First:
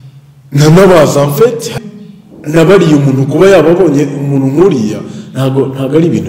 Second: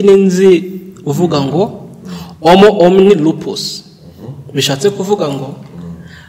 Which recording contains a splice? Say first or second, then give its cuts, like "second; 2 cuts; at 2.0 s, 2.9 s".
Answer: first; 1 cut; at 1.7 s